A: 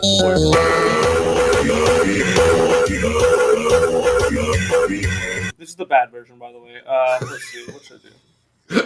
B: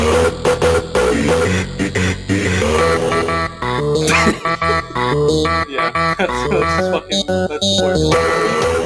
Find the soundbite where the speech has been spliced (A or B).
A